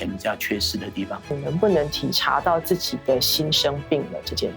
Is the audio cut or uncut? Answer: cut